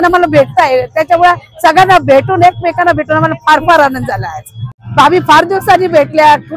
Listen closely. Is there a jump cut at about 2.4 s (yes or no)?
no